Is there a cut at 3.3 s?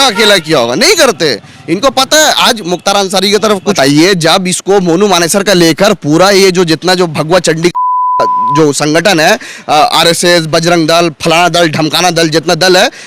yes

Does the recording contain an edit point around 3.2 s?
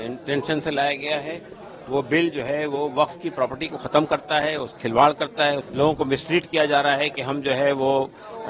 no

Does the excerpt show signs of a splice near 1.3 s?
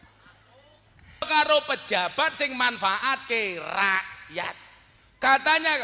yes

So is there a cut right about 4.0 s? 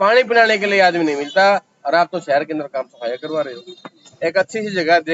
yes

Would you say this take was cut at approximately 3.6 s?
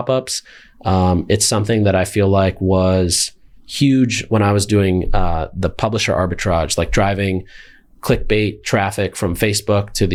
no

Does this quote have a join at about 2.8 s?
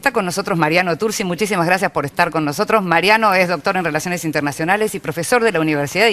yes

